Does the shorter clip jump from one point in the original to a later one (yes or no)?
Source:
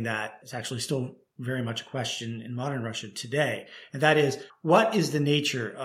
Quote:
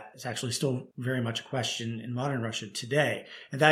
yes